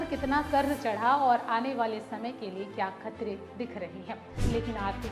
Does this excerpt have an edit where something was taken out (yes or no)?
yes